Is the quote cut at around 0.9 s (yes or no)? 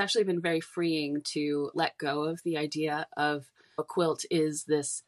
no